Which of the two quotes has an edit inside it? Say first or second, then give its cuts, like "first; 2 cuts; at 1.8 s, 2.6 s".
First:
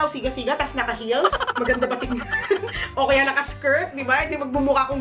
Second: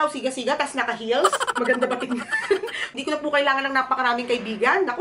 second; 1 cut; at 2.9 s